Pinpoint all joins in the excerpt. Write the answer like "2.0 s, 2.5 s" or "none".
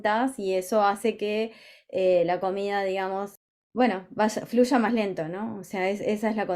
3.4 s